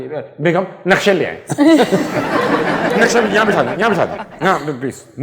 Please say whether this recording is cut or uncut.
cut